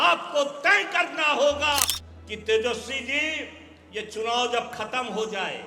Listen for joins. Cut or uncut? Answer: cut